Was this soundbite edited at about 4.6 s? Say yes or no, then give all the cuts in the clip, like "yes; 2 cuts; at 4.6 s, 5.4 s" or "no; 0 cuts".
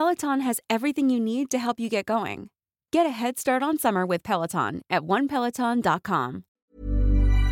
no; 1 cut; at 6.6 s